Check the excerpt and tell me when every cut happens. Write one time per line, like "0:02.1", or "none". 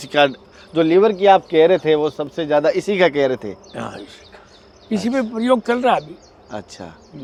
none